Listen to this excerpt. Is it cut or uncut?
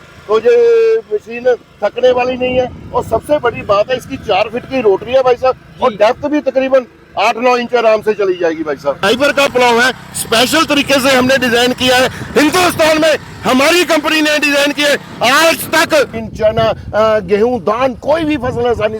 cut